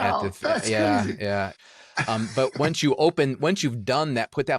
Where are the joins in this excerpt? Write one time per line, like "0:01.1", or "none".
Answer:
0:01.5